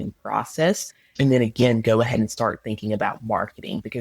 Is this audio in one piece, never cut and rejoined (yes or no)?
no